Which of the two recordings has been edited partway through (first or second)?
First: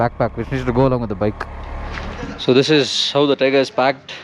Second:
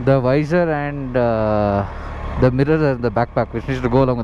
first